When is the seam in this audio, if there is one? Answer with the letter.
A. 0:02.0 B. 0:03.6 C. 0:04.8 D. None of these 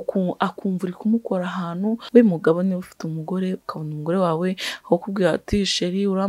A